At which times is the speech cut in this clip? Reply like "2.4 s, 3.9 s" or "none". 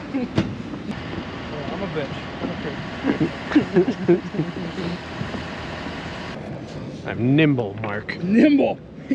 0.9 s, 6.3 s